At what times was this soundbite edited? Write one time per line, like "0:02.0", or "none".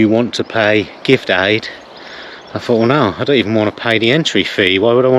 none